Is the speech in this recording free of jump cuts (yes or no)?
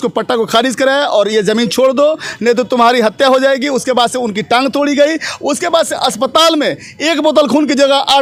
yes